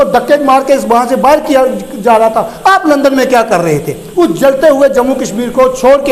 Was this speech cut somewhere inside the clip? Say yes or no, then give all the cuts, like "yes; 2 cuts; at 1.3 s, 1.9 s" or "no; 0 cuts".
no; 0 cuts